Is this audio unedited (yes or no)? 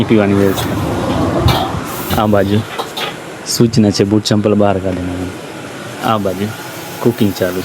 yes